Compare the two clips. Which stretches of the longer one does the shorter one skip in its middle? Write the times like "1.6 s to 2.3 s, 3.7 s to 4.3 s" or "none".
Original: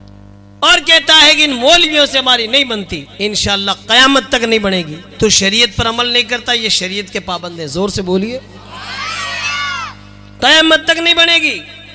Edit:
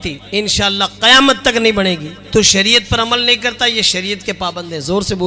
none